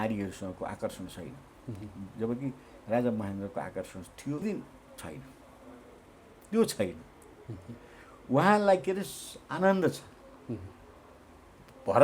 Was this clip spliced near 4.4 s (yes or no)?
yes